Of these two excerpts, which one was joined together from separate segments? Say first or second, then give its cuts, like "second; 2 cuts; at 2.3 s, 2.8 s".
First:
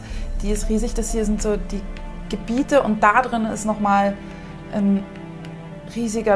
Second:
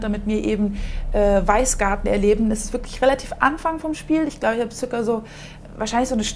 second; 1 cut; at 1.9 s